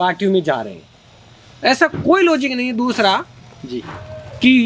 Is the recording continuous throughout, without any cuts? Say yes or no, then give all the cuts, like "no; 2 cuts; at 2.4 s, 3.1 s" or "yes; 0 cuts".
yes; 0 cuts